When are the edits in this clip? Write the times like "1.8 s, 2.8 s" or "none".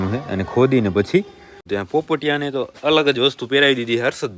1.6 s